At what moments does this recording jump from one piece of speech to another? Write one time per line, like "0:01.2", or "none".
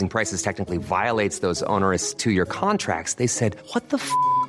none